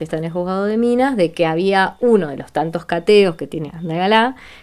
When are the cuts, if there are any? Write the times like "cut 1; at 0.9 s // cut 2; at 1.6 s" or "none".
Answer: cut 1; at 1.9 s // cut 2; at 3.7 s